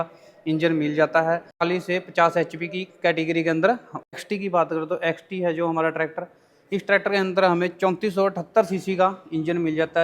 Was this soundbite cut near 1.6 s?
yes; 2 cuts; at 1.6 s, 4.5 s

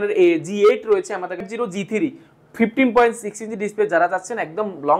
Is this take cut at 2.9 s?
no; 1 cut; at 1.5 s

